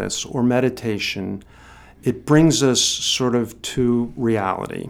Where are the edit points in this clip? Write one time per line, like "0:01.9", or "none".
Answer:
none